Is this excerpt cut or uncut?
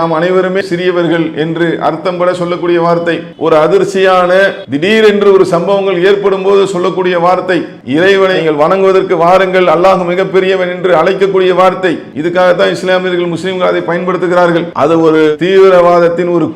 cut